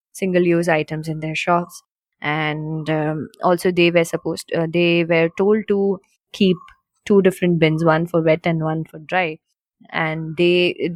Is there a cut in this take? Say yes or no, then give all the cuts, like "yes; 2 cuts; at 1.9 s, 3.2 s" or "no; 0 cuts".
no; 0 cuts